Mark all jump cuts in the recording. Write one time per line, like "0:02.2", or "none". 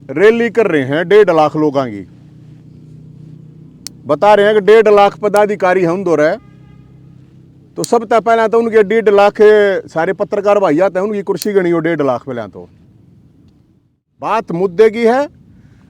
0:14.3